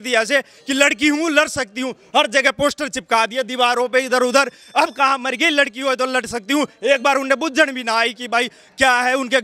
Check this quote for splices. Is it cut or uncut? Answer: uncut